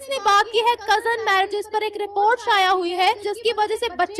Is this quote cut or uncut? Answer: cut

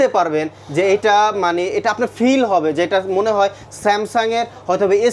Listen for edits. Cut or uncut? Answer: uncut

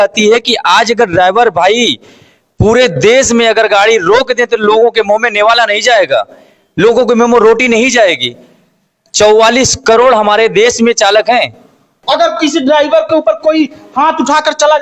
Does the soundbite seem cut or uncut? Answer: cut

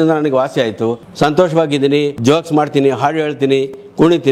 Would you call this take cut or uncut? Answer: cut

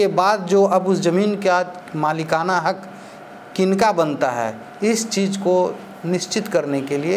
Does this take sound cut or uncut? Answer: uncut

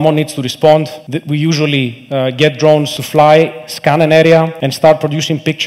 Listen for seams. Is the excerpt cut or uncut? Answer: cut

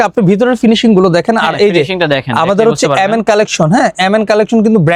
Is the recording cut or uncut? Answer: uncut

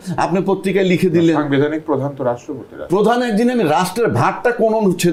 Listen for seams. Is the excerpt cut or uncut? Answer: uncut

